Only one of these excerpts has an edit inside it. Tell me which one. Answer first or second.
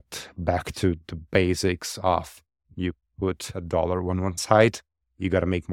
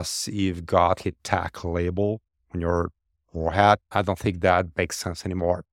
second